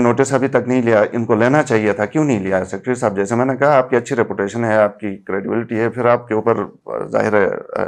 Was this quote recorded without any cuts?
yes; 0 cuts

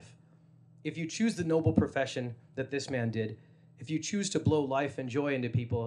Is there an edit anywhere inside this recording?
no; 0 cuts

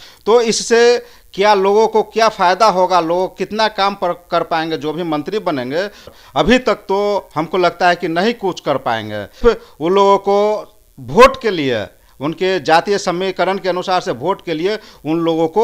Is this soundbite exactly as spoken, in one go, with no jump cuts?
no; 2 cuts; at 6.1 s, 9.4 s

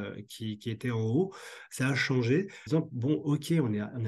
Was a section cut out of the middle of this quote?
yes; 1 cut; at 2.6 s

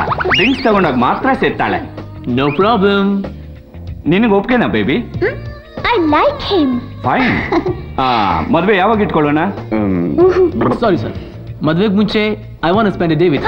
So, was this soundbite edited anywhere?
no; 0 cuts

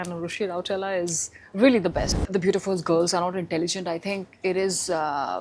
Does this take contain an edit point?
yes; 1 cut; at 2.1 s

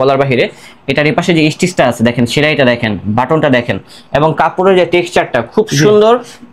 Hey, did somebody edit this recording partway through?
no; 0 cuts

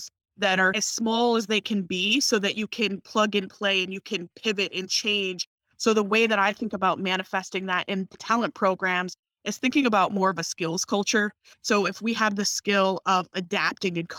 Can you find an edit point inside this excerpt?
yes; 3 cuts; at 5.6 s, 8.2 s, 11.5 s

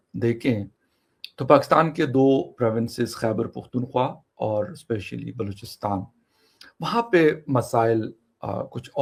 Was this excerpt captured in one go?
yes; 0 cuts

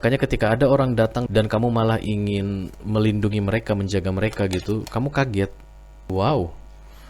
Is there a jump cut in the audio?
yes; 1 cut; at 6.1 s

